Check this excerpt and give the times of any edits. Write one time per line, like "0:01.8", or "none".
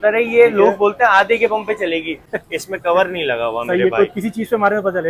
0:02.3

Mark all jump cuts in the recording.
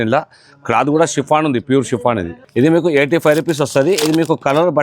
0:02.4

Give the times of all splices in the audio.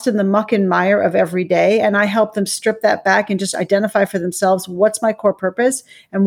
none

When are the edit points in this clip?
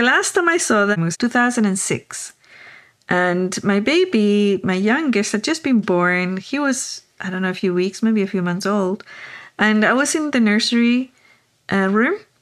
0:01.0

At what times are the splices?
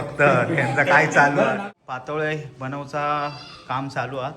0:01.6

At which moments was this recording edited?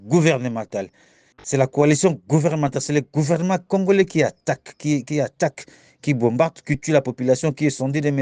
none

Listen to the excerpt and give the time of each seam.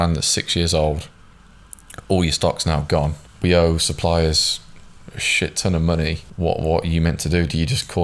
0:03.2
0:06.2

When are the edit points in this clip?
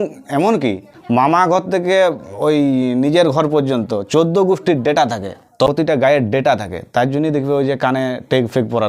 0:01.0
0:05.7

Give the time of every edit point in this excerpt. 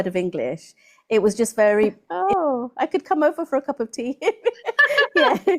0:02.0

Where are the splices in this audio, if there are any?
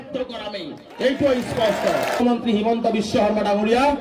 0:02.2

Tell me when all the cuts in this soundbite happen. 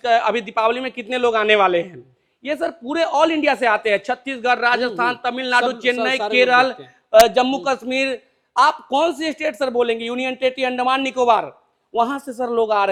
none

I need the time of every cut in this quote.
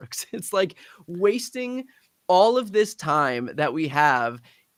none

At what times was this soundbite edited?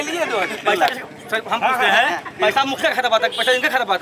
none

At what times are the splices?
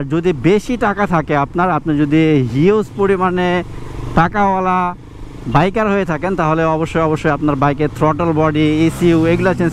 none

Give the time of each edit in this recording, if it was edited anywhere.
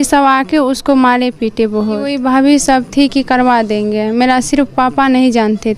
0:02.1

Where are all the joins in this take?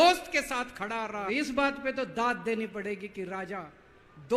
0:01.3

